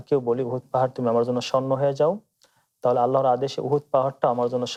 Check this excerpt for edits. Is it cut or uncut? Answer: uncut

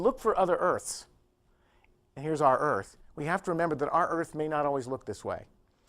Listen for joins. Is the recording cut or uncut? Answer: cut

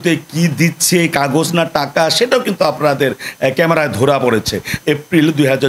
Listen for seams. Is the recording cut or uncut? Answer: cut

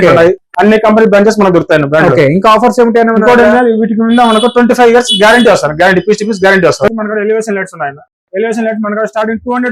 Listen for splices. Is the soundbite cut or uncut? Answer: cut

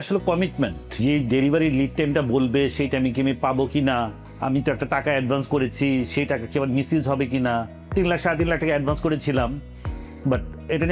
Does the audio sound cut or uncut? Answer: cut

